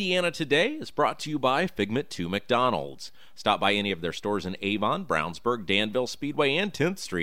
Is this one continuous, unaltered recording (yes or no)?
yes